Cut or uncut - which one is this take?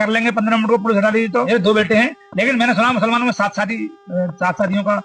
cut